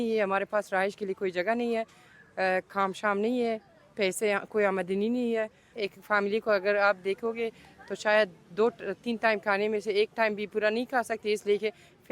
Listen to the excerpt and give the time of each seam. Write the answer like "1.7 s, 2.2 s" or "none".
5.7 s